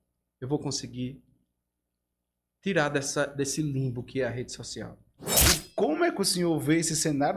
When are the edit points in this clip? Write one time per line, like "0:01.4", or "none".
0:05.3